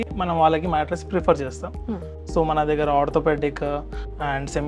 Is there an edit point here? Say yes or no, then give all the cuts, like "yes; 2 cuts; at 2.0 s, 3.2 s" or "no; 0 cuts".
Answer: no; 0 cuts